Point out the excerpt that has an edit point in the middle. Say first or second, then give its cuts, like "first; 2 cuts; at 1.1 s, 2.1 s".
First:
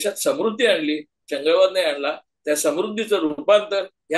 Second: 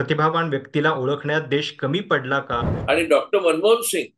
second; 1 cut; at 2.7 s